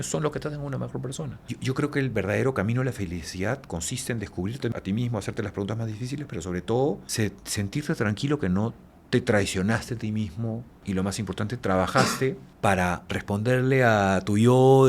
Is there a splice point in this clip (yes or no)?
yes